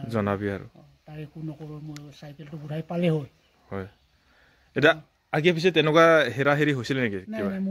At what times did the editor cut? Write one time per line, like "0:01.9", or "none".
none